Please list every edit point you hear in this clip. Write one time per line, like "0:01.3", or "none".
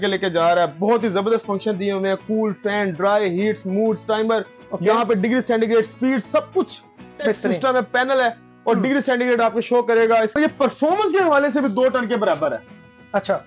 0:10.4